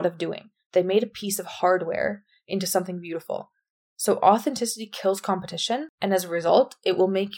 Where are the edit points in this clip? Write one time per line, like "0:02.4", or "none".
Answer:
0:05.9